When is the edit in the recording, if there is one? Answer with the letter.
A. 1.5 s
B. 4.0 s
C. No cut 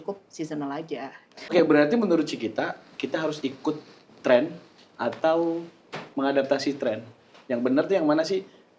A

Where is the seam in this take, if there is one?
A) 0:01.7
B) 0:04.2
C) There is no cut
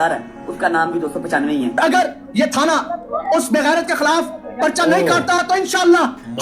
A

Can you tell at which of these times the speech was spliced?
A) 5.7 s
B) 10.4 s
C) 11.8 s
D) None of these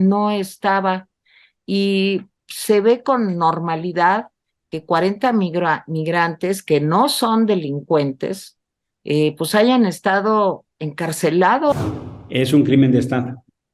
C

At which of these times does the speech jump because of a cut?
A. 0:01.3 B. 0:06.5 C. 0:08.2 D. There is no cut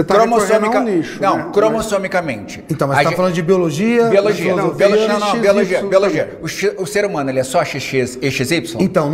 D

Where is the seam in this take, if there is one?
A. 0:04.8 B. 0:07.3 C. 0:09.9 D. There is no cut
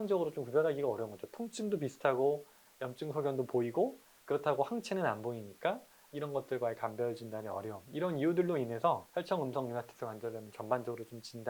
D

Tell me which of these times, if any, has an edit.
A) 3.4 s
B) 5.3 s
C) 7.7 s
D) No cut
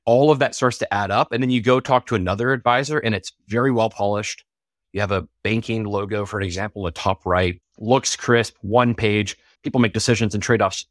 C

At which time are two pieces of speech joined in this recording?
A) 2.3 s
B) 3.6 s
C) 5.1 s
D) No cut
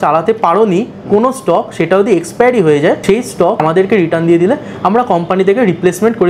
B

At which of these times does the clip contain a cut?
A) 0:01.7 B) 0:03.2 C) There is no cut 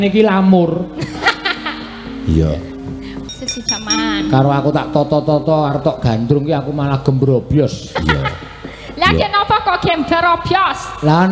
B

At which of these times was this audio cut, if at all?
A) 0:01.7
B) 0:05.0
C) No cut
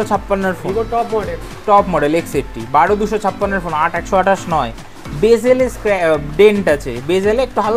C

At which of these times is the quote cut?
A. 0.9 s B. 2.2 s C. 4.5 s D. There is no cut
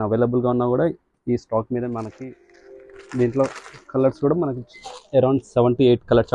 B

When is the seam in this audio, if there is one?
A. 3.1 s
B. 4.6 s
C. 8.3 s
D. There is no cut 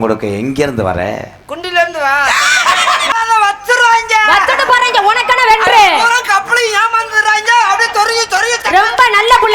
A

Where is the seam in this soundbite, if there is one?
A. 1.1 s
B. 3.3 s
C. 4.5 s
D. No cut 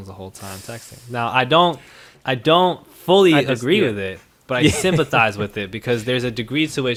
D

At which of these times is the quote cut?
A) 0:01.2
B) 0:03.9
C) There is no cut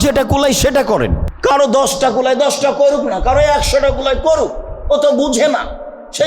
A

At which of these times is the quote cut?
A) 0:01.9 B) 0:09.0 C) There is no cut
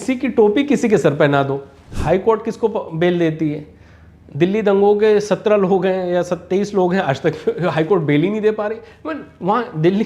A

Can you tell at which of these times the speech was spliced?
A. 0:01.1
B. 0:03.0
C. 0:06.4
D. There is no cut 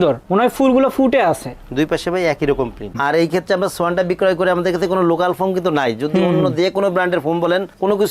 B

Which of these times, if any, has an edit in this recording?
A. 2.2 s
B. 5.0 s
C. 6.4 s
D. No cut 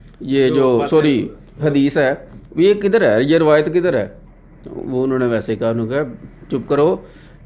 D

